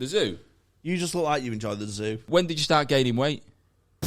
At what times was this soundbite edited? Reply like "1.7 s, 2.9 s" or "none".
2.2 s